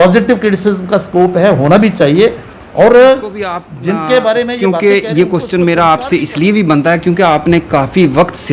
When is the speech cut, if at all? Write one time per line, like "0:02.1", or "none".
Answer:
0:04.6